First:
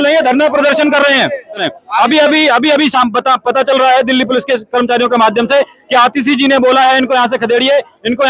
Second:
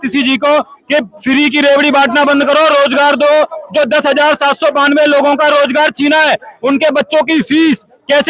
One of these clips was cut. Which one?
first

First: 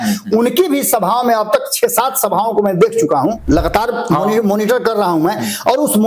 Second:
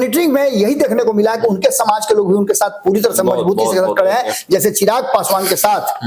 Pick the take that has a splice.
first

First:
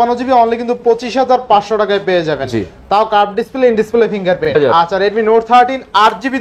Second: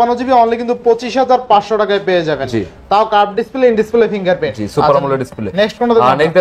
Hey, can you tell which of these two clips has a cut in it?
first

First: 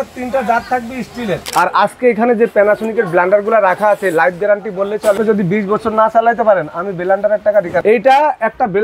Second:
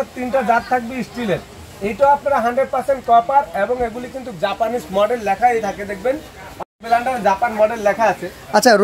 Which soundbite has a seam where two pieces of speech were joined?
first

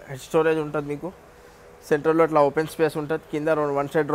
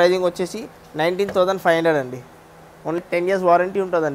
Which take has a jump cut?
second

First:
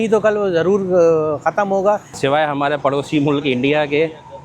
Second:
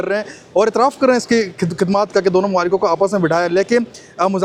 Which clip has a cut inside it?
first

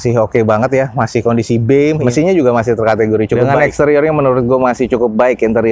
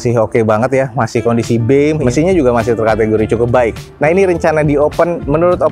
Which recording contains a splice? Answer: first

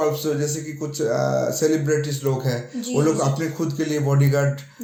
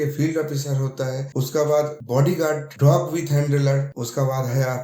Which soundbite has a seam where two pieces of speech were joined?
second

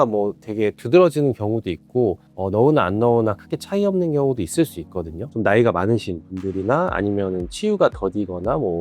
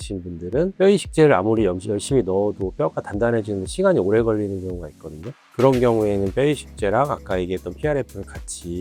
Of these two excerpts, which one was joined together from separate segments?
first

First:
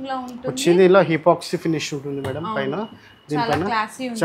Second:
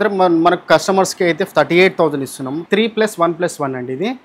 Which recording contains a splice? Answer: second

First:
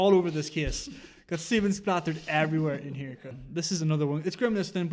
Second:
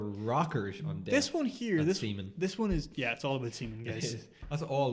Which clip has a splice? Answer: first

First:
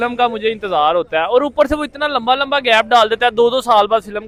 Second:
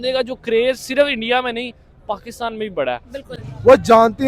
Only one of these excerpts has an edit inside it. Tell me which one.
second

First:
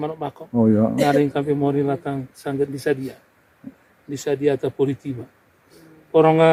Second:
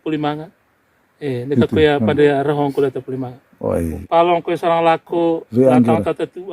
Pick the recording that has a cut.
second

